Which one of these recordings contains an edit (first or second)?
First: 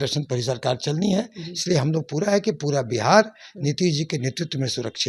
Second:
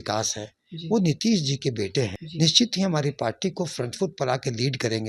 second